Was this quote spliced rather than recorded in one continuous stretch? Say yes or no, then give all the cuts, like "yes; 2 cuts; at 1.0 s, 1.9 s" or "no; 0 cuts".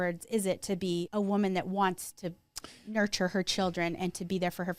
yes; 1 cut; at 1.1 s